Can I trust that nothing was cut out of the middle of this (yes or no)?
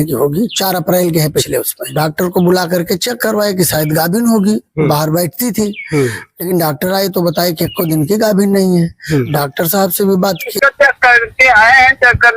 no